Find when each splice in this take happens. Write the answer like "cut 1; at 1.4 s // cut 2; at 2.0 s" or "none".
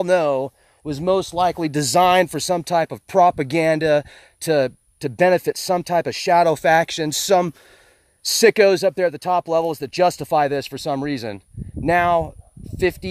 cut 1; at 7.1 s